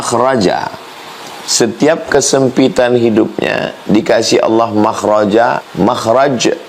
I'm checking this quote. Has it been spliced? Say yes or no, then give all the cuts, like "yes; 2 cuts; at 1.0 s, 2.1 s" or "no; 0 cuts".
yes; 1 cut; at 5.7 s